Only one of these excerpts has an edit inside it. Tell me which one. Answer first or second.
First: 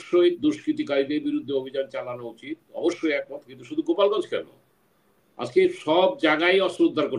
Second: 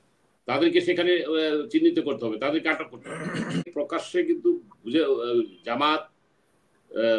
second